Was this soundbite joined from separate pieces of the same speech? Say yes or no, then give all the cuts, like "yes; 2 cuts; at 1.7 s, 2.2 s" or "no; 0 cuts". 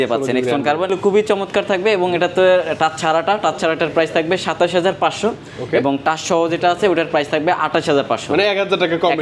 yes; 1 cut; at 0.9 s